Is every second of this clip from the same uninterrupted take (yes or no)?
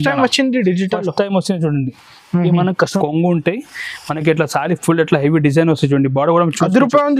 no